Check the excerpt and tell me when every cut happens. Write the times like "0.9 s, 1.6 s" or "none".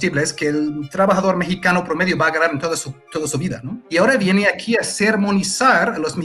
3.7 s